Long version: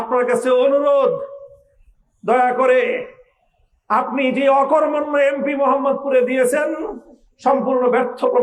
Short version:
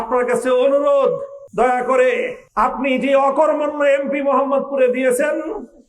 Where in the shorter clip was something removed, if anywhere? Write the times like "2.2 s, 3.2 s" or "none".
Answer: 1.4 s, 2.4 s